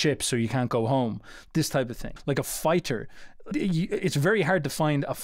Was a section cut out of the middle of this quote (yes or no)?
yes